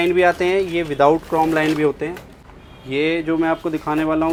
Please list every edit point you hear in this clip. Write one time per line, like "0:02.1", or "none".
none